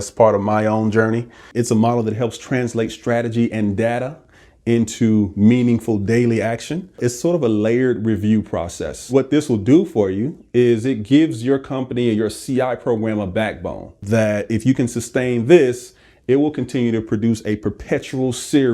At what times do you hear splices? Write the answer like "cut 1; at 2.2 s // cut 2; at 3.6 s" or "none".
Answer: cut 1; at 1.4 s // cut 2; at 7.0 s // cut 3; at 9.1 s // cut 4; at 14.0 s